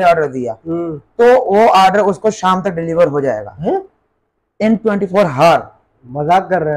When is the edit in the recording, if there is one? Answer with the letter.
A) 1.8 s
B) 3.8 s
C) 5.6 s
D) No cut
D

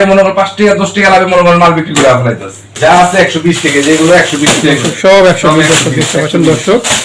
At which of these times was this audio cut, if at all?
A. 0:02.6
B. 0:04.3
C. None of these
A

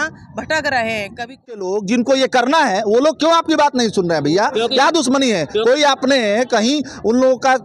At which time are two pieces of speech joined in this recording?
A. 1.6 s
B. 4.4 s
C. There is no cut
A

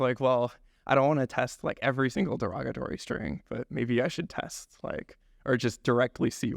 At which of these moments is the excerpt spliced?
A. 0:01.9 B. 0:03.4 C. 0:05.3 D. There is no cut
D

